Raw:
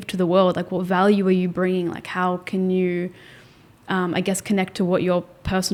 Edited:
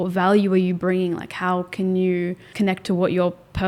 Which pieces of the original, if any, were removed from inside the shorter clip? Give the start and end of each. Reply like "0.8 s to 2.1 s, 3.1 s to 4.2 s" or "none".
3.2 s to 4.4 s